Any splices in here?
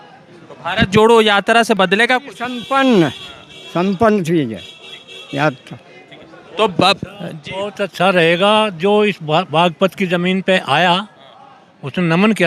no; 0 cuts

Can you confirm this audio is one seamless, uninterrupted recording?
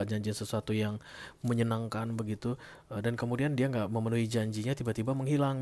yes; 0 cuts

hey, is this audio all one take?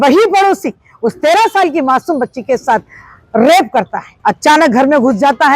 no; 1 cut; at 4.0 s

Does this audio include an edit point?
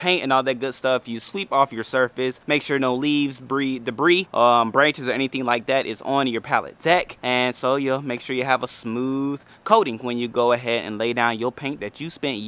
yes; 3 cuts; at 2.4 s, 4.3 s, 7.1 s

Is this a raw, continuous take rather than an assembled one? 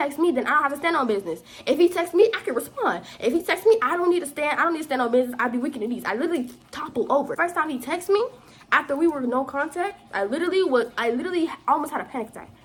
yes; 0 cuts

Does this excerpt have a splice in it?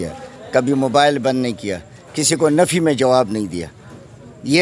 no; 0 cuts

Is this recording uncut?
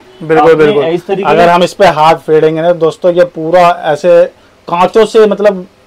yes; 0 cuts

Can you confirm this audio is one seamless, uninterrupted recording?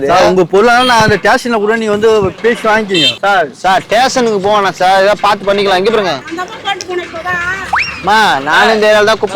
no; 2 cuts; at 3.1 s, 6.2 s

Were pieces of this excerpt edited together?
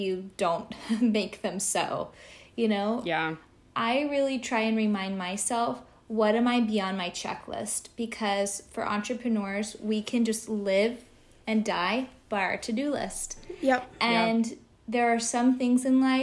no; 0 cuts

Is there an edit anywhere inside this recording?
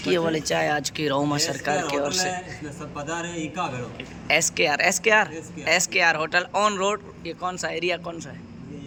no; 0 cuts

